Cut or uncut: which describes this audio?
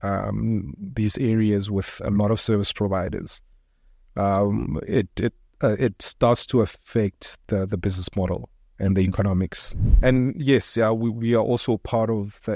cut